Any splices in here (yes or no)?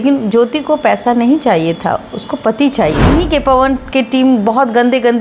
yes